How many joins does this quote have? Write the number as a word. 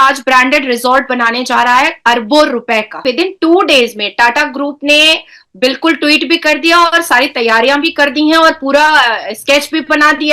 one